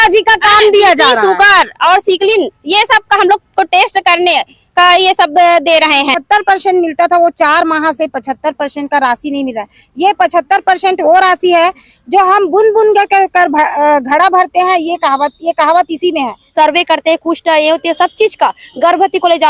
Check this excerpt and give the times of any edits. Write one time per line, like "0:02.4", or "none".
0:06.2
0:16.4

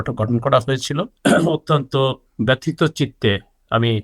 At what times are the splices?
0:01.1

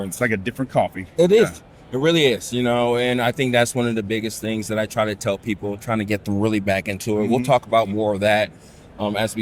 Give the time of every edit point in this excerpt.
none

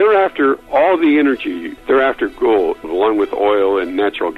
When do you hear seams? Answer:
0:01.7
0:02.8

